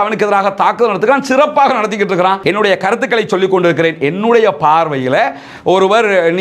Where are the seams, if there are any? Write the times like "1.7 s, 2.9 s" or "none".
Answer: 2.4 s